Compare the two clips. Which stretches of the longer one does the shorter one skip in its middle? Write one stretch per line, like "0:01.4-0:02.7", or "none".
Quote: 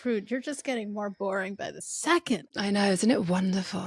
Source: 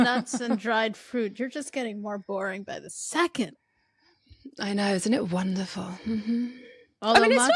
0:03.6-0:04.5